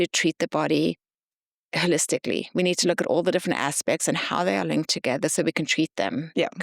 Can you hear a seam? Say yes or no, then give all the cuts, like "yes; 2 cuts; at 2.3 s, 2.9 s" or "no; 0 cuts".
no; 0 cuts